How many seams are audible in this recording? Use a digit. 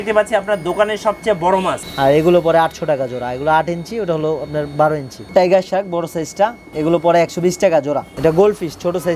4